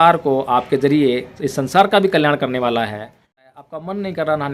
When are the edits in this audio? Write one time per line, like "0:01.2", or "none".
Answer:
0:03.4